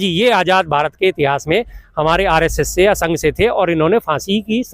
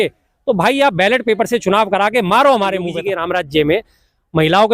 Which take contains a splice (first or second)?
second